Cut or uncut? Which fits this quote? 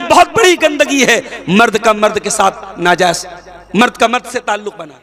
uncut